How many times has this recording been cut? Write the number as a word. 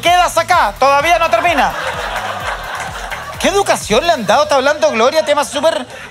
zero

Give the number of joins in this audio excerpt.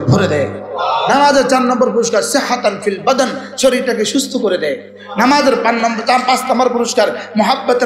zero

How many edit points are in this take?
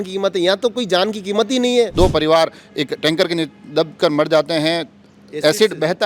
one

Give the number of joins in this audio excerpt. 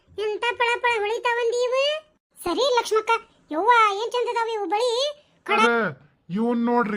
one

